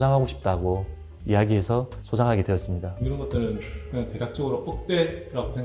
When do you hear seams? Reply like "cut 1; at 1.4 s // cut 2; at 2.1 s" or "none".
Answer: cut 1; at 2.9 s